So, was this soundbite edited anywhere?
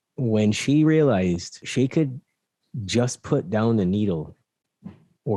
yes; 1 cut; at 1.6 s

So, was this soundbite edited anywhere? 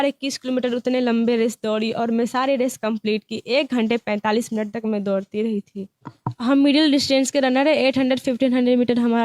yes; 1 cut; at 6.2 s

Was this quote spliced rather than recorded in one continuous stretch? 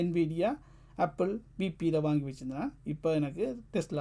no; 0 cuts

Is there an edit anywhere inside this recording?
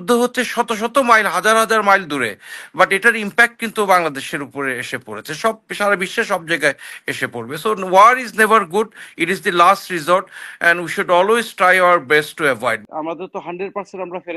yes; 1 cut; at 12.8 s

